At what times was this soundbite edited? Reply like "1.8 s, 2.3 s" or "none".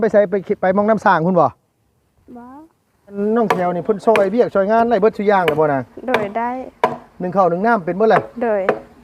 3.2 s

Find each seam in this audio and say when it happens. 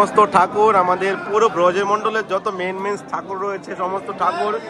none

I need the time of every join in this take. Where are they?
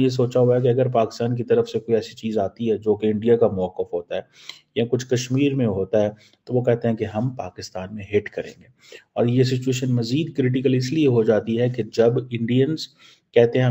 none

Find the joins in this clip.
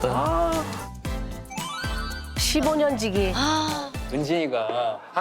4.0 s

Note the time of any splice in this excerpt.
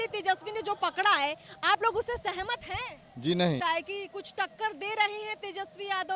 3.6 s

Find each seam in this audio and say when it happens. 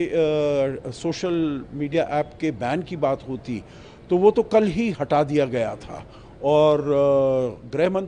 none

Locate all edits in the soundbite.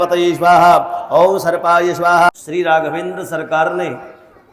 2.3 s

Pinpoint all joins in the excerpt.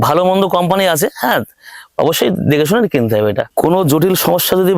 3.4 s

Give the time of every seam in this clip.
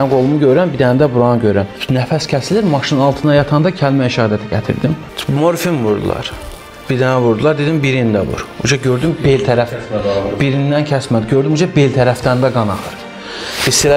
1.8 s, 5.2 s

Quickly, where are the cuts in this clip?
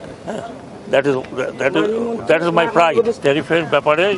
3.2 s

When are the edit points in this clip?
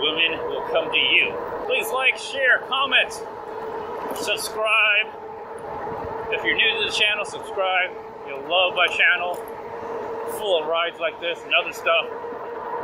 1.6 s

